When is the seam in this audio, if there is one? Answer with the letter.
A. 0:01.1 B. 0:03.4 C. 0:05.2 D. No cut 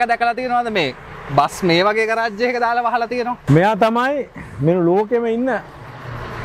B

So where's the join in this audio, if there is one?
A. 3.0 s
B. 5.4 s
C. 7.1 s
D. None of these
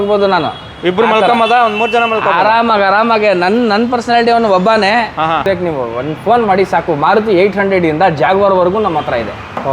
B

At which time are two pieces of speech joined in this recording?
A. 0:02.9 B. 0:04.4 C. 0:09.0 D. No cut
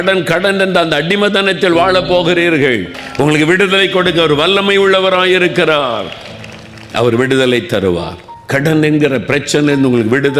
A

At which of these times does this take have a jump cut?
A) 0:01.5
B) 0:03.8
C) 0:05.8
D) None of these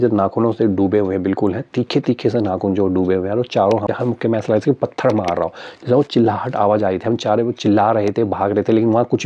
B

